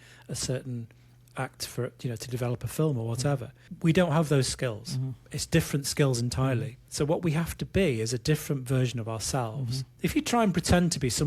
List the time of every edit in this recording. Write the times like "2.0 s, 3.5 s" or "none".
3.6 s, 6.8 s, 9.8 s